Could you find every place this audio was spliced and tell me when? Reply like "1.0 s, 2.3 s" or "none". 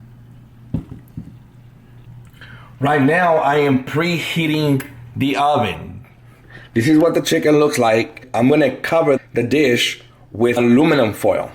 2.1 s, 8.2 s, 9.2 s, 10.6 s